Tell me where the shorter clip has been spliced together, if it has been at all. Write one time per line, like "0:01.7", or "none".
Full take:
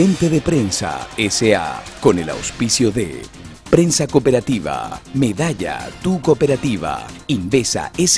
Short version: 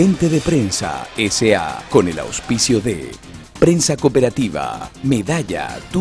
0:01.8